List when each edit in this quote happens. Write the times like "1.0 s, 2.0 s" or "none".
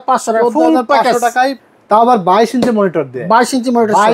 1.6 s